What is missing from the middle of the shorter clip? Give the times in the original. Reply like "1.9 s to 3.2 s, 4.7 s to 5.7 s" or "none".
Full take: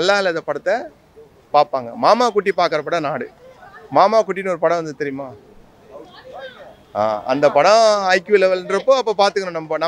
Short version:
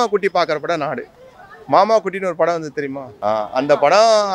5.3 s to 6.8 s